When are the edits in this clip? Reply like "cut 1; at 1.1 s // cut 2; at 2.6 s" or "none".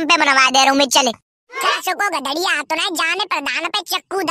cut 1; at 1.5 s